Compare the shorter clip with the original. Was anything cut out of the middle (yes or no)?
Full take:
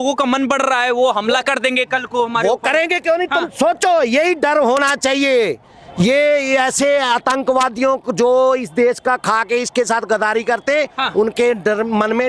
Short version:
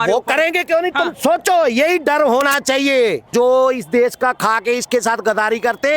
yes